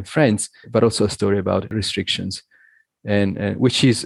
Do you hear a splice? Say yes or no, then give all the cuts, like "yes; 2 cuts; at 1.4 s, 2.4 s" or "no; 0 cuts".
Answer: yes; 1 cut; at 1.7 s